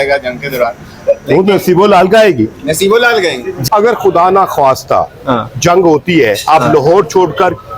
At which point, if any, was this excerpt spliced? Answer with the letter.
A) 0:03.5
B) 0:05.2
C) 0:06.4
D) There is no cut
A